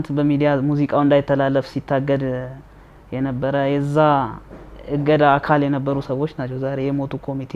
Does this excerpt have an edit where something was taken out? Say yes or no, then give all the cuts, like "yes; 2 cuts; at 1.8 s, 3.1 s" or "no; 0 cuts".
no; 0 cuts